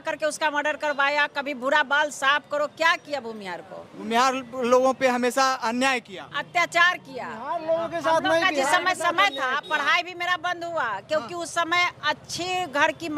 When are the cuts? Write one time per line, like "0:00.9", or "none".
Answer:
none